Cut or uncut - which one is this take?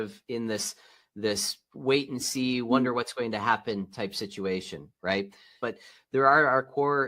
cut